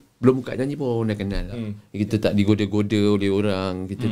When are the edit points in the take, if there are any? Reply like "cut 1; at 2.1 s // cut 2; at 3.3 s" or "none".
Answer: cut 1; at 1.8 s